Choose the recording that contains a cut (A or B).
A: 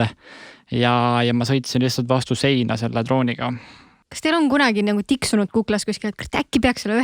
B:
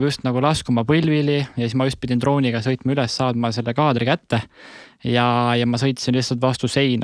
A